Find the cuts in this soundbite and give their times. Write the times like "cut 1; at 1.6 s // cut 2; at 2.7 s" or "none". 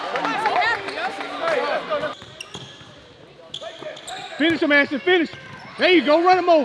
cut 1; at 2.1 s